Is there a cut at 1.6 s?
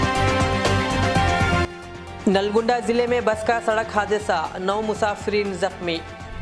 yes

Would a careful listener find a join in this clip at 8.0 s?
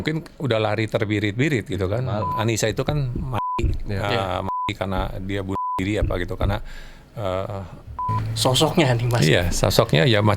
yes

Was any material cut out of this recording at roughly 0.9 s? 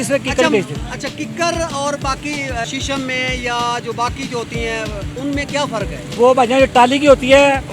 no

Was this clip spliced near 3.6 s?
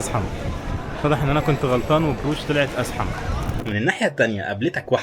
yes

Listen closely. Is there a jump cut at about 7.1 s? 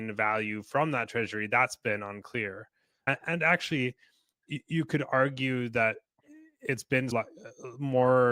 yes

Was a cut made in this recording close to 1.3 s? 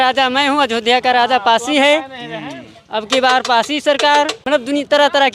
no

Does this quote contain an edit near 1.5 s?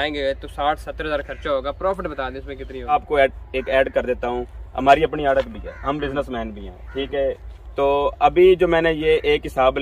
no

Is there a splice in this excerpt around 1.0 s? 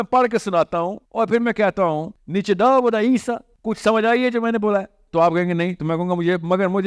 yes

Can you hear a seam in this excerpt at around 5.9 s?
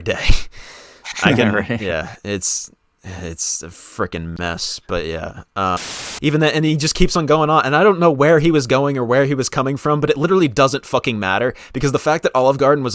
yes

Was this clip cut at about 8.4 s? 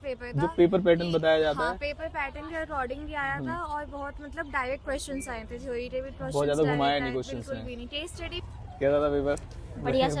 yes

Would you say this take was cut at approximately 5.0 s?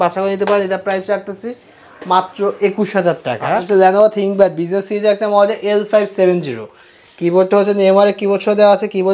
no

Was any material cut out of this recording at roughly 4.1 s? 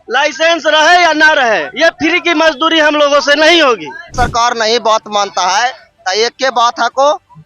yes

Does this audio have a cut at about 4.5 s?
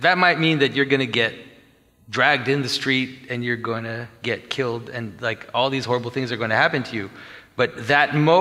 no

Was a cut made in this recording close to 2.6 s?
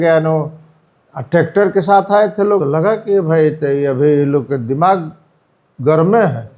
yes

